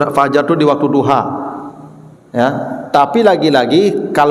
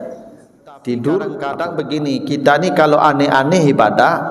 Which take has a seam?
second; 1 cut; at 1.7 s

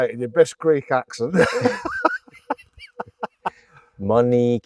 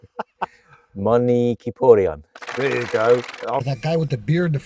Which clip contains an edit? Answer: second; 1 cut; at 3.7 s

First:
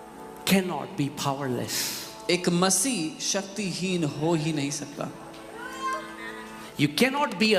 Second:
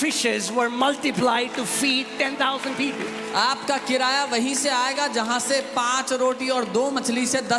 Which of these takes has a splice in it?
first; 1 cut; at 6.6 s

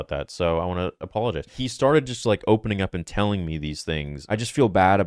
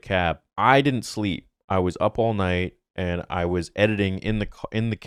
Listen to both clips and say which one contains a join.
first; 2 cuts; at 1.6 s, 4.2 s

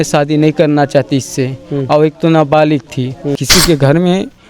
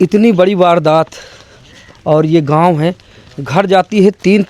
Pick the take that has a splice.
first; 1 cut; at 3.4 s

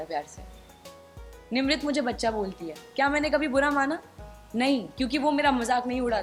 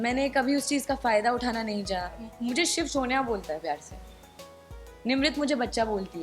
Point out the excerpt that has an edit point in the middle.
second; 1 cut; at 2.2 s

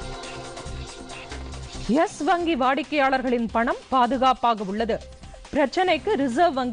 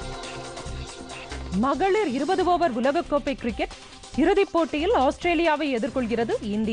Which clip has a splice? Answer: first; 1 cut; at 1.2 s

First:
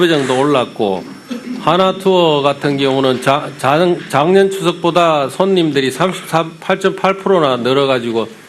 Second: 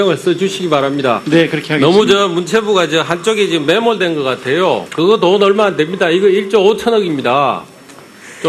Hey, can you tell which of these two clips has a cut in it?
second; 1 cut; at 6.3 s

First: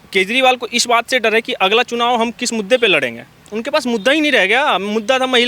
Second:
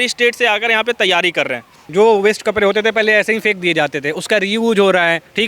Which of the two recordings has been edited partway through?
second; 1 cut; at 1.8 s

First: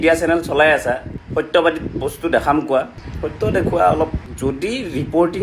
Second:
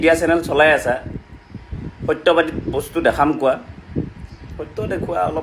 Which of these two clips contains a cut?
first; 3 cuts; at 1.1 s, 3.0 s, 4.2 s

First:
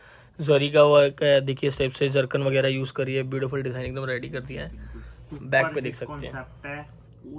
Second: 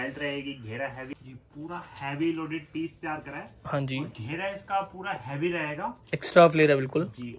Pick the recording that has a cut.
second; 1 cut; at 1.1 s

